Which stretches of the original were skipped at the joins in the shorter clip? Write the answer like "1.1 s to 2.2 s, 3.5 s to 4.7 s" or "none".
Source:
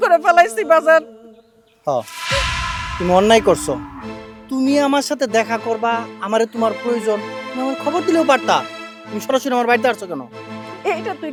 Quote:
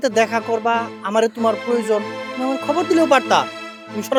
none